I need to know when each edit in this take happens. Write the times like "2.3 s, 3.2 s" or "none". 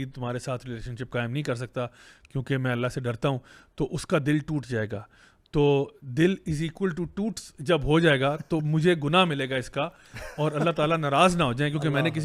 none